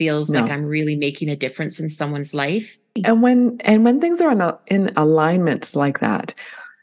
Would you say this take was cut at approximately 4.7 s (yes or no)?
no